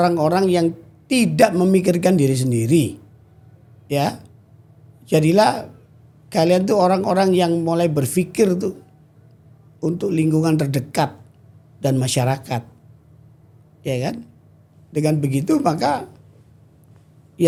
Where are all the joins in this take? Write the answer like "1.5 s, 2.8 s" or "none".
none